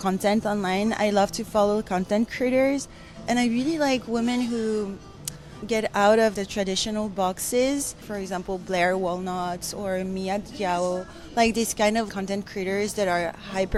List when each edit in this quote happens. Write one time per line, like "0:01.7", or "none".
none